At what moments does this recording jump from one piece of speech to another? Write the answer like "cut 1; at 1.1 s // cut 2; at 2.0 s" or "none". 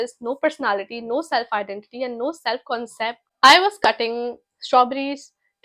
cut 1; at 3.2 s